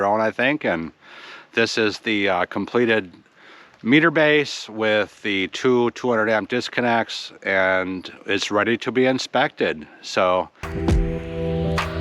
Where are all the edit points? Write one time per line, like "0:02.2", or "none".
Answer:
0:10.6